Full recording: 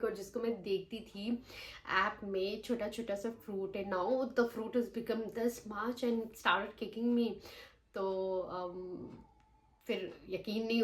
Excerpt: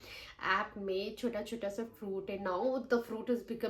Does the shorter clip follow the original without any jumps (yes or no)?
yes